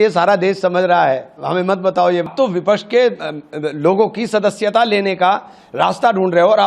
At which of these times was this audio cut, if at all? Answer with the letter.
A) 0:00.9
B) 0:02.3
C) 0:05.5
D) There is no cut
B